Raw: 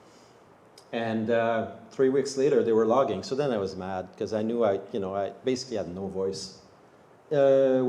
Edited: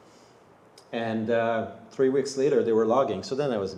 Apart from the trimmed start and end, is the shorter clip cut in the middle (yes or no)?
no